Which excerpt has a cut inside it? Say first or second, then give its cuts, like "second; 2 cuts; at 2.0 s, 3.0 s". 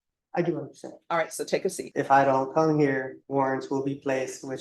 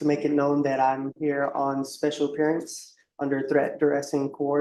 first; 2 cuts; at 1.8 s, 3.2 s